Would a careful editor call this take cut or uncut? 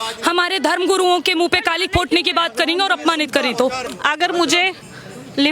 cut